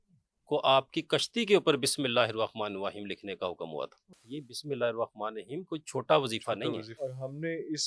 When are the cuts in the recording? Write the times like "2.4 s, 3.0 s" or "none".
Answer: 4.1 s, 6.9 s